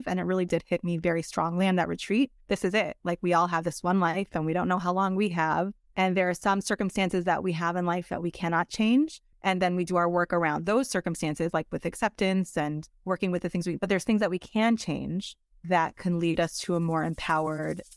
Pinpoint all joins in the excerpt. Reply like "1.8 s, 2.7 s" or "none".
9.3 s

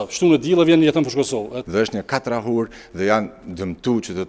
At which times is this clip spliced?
1.6 s

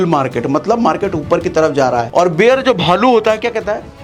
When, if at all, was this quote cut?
2.1 s

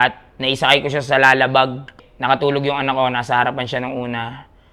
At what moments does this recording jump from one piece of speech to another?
2.0 s

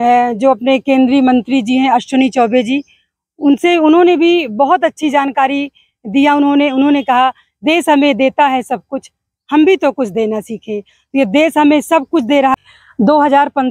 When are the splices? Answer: 12.5 s

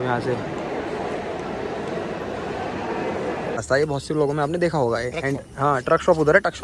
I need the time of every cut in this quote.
3.6 s

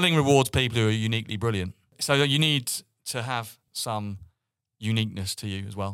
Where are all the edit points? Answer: 2.0 s, 3.7 s

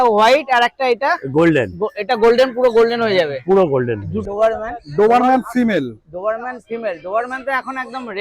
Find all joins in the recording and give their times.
4.2 s

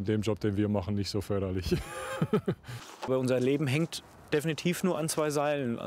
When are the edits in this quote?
3.1 s

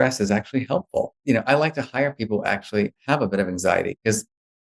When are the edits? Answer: 1.2 s

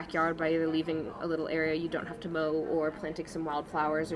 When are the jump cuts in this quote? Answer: none

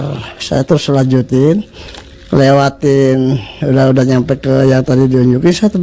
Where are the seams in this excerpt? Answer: none

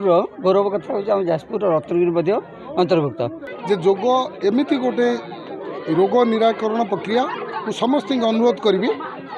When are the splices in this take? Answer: 3.4 s

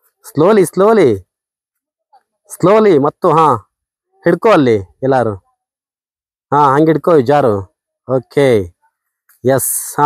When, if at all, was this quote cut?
none

